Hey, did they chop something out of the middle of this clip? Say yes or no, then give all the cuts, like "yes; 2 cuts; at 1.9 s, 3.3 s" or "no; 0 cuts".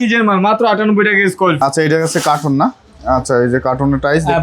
yes; 1 cut; at 1.6 s